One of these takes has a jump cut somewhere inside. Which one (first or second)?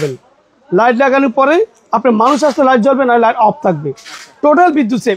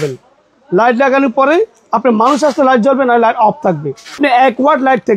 second